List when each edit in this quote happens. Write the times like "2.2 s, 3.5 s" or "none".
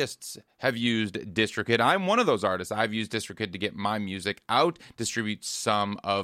none